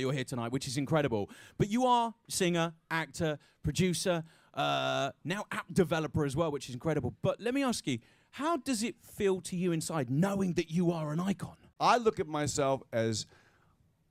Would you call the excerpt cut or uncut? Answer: uncut